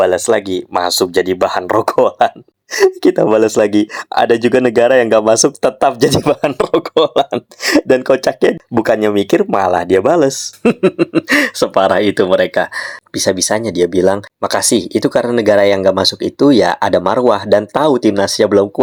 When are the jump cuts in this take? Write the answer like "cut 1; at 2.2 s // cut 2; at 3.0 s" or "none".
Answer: none